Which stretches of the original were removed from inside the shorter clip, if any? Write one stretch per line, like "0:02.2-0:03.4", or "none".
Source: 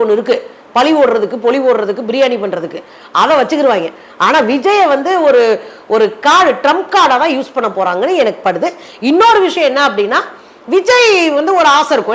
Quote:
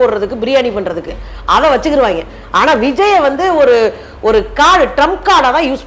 none